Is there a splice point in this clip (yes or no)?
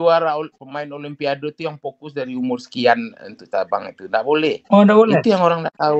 no